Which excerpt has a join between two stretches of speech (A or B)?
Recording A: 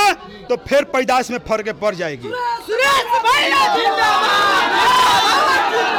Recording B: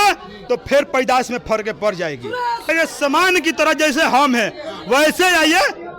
B